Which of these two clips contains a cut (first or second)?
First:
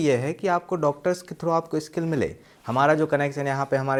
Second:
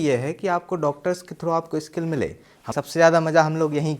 second